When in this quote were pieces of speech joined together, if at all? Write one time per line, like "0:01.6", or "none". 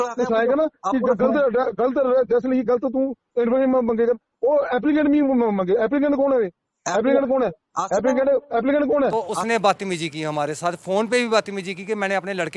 0:09.1